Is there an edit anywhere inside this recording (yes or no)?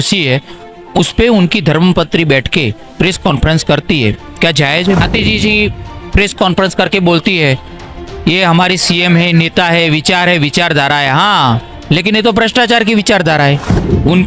yes